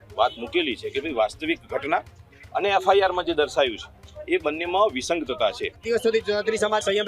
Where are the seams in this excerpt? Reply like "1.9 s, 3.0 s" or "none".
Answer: 5.7 s